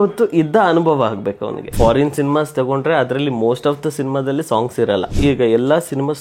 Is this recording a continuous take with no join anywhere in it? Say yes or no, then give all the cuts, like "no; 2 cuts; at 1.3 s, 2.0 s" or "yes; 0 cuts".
no; 2 cuts; at 1.7 s, 5.1 s